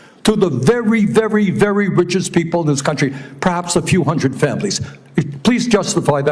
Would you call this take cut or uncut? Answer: uncut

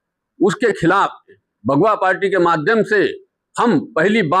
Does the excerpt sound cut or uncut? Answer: cut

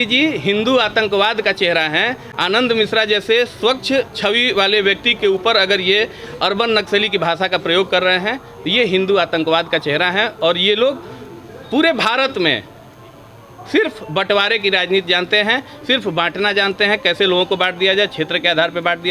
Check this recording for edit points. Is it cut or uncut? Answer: uncut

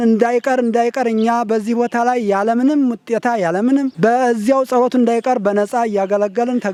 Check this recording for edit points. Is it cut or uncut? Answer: uncut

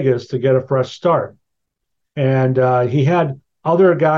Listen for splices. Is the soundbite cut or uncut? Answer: uncut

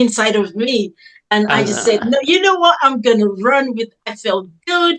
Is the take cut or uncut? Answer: uncut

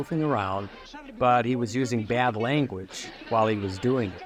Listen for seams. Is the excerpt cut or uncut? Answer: uncut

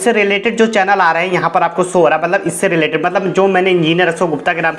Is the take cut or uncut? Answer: uncut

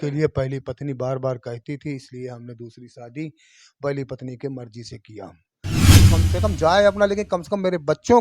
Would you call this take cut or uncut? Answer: cut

